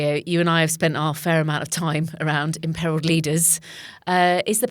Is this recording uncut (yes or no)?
yes